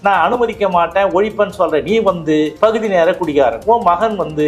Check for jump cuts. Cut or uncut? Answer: cut